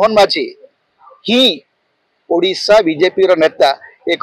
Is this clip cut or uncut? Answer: uncut